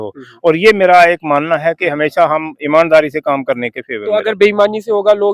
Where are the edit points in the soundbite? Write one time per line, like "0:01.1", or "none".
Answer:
none